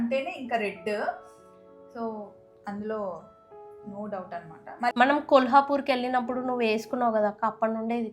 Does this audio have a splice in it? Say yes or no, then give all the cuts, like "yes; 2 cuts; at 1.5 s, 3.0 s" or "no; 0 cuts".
yes; 1 cut; at 4.9 s